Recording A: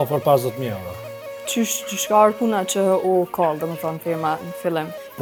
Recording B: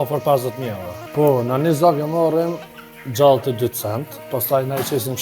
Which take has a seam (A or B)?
B